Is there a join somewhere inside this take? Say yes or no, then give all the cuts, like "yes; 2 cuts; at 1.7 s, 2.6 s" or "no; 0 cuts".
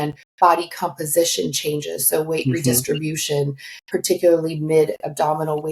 no; 0 cuts